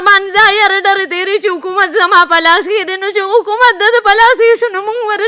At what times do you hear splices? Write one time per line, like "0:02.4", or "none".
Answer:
none